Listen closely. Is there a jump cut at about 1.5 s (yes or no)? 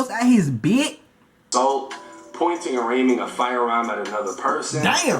yes